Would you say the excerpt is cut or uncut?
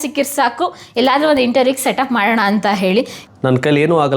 cut